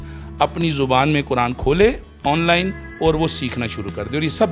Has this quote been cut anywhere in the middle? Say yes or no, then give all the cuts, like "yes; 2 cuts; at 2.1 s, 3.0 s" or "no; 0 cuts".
no; 0 cuts